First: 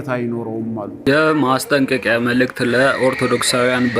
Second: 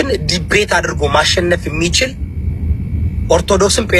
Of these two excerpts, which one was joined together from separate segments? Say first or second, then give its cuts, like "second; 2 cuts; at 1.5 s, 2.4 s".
first; 1 cut; at 1.0 s